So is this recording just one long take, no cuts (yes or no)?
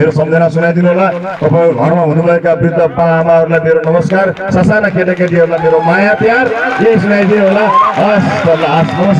yes